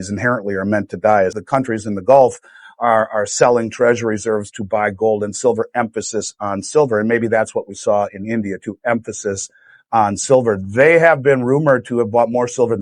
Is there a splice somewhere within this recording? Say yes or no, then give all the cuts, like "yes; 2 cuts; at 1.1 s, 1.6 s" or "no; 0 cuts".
yes; 1 cut; at 1.4 s